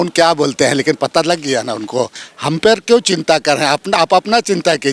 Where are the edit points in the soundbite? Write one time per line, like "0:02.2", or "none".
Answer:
0:02.3